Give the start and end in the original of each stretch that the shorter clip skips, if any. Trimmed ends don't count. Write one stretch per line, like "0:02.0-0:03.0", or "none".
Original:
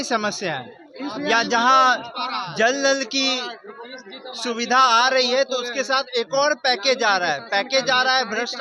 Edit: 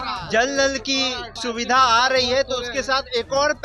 0:03.5-0:04.3